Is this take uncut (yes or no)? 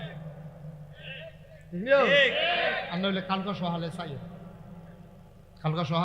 no